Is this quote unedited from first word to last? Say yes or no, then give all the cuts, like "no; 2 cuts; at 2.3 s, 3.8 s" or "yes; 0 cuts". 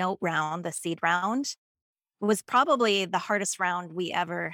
yes; 0 cuts